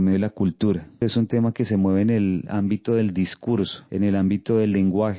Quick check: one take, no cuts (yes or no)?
no